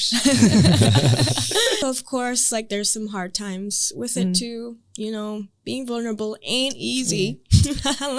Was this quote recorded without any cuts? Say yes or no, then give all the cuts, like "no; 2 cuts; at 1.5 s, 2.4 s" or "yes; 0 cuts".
no; 1 cut; at 1.8 s